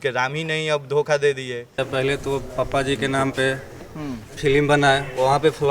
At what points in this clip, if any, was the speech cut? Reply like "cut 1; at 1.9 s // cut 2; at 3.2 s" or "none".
cut 1; at 1.7 s